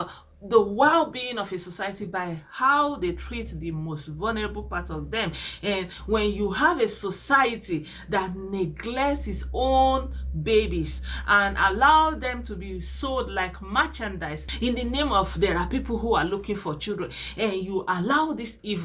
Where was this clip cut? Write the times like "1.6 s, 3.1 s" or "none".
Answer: 14.4 s